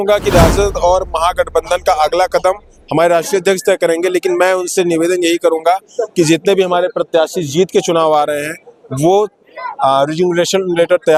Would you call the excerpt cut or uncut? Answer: uncut